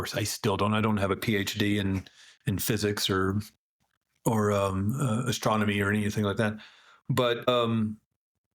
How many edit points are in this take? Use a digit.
1